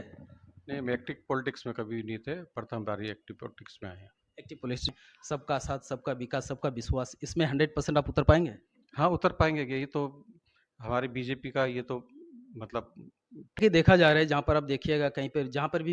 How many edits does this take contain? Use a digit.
2